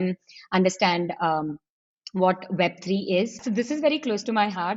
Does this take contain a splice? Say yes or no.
yes